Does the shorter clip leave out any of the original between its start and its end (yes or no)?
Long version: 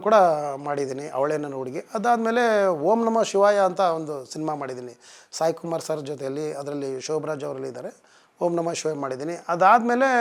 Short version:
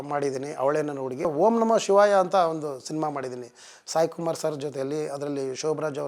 yes